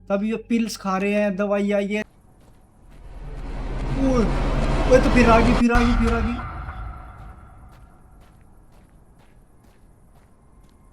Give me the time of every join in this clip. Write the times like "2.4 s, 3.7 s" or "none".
2.0 s